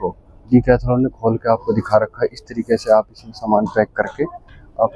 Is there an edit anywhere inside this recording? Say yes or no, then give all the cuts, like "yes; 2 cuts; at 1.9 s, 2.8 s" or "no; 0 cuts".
no; 0 cuts